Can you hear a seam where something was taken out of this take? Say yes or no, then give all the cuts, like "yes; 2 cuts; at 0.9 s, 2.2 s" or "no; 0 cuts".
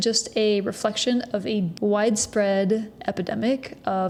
no; 0 cuts